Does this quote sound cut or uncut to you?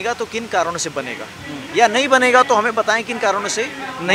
uncut